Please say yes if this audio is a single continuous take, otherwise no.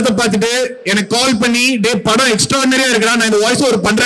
yes